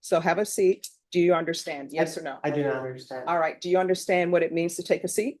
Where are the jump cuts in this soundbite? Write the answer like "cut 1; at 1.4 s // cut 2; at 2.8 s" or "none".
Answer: cut 1; at 0.9 s